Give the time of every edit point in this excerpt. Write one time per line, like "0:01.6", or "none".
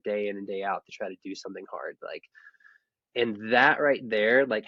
none